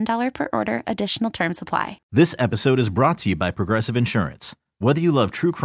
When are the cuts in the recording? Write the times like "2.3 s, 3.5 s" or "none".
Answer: 2.0 s